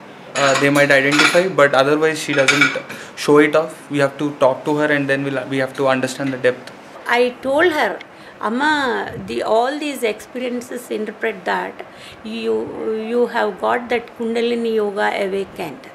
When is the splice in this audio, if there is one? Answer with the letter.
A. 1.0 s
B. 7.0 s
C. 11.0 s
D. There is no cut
B